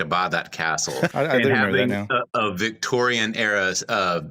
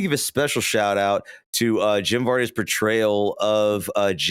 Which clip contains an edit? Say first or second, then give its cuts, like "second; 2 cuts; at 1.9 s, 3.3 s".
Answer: first; 1 cut; at 1.1 s